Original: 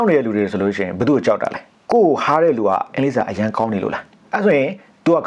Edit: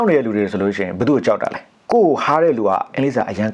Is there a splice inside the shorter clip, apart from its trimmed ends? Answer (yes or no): no